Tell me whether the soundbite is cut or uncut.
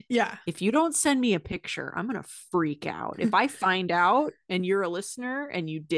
uncut